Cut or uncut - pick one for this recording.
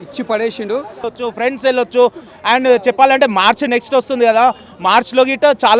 cut